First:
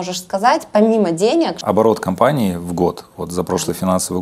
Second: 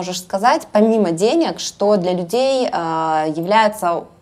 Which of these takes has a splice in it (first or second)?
first